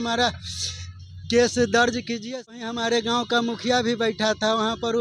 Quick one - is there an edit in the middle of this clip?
yes; 1 cut; at 2.5 s

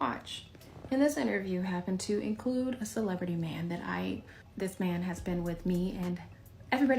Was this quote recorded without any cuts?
no; 1 cut; at 4.4 s

